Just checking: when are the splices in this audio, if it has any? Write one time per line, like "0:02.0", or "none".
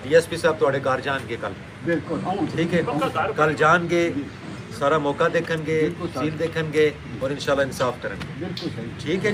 none